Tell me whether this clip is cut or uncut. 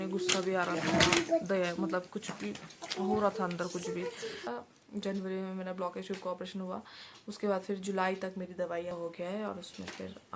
cut